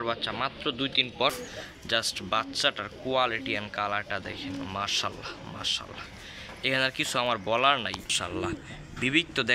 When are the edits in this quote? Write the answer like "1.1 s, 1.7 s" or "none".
1.4 s, 8.2 s

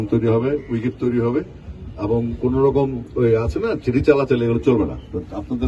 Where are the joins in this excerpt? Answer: none

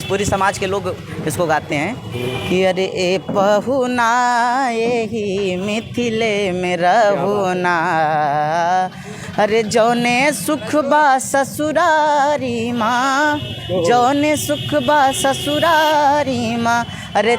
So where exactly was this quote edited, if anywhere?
none

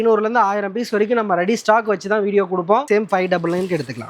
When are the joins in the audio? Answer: 2.9 s

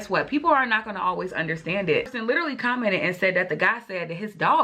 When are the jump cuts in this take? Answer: 2.1 s

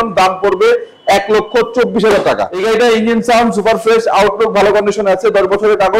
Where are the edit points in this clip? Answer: 2.6 s

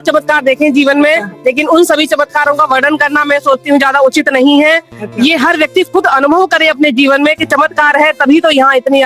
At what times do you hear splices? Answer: none

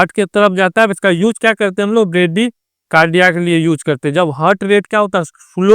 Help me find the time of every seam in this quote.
1.0 s

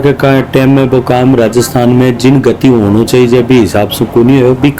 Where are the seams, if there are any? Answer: none

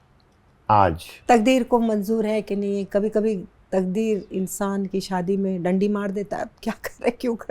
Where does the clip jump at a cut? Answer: 1.1 s

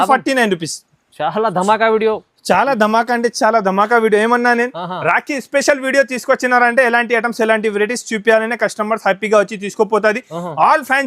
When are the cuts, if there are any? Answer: none

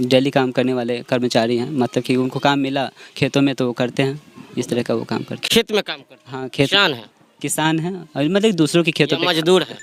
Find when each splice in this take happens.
none

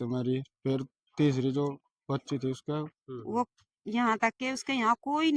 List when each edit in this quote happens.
3.0 s

